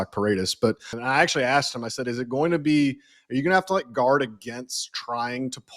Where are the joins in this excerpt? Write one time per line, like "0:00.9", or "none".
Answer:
0:00.9